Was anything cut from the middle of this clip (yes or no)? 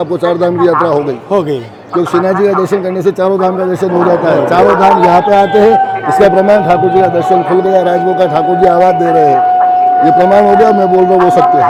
no